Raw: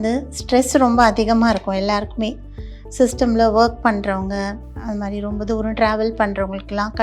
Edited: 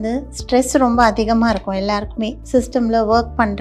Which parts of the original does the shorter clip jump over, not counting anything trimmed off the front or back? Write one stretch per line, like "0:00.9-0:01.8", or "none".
0:02.4-0:02.8